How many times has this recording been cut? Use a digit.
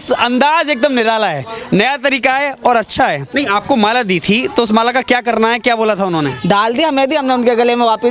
1